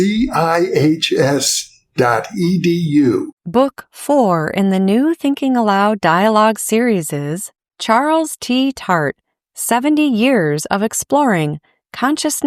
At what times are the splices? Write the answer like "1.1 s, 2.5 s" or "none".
3.4 s